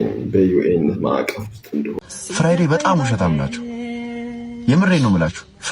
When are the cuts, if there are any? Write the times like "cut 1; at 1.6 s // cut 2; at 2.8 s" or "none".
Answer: cut 1; at 1.9 s

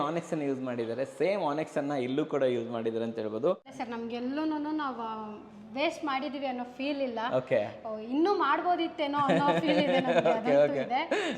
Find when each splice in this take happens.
cut 1; at 3.8 s

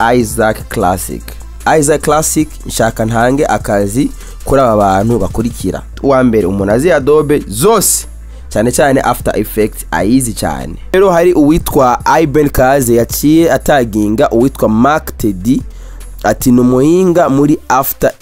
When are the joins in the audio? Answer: cut 1; at 1.4 s // cut 2; at 6.0 s // cut 3; at 10.9 s

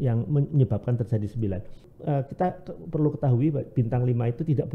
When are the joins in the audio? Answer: cut 1; at 1.9 s

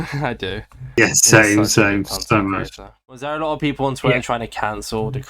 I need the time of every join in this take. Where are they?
cut 1; at 3.0 s

